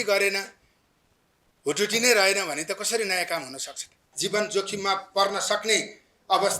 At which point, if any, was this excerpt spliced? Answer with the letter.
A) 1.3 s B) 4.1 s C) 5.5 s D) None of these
B